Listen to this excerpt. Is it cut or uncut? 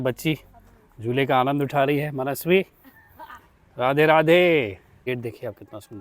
cut